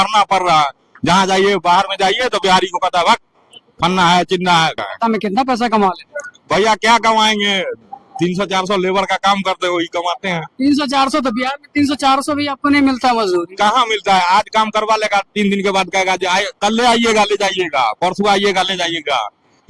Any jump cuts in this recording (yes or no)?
no